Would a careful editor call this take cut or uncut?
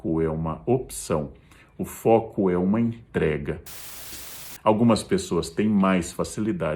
cut